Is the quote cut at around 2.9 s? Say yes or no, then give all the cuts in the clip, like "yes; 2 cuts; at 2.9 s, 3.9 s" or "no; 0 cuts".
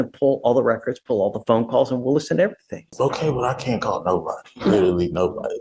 yes; 1 cut; at 2.9 s